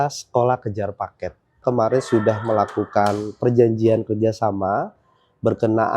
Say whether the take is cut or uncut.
cut